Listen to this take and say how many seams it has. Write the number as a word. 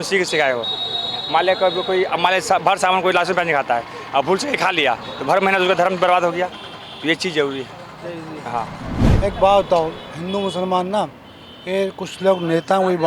one